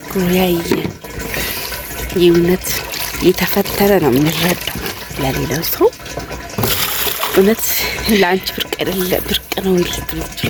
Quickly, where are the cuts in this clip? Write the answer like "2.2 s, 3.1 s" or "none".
none